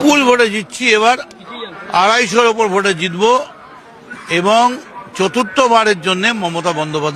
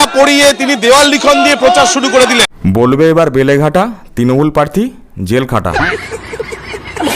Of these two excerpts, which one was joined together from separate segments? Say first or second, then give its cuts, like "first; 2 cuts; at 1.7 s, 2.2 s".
second; 2 cuts; at 2.5 s, 5.7 s